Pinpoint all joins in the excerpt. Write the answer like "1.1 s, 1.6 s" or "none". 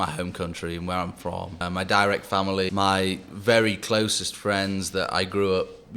1.6 s, 2.7 s